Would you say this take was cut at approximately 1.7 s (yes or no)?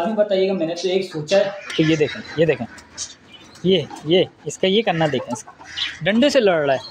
yes